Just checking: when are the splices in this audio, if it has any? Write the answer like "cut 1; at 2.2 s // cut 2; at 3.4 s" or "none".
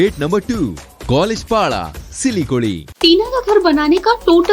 cut 1; at 2.9 s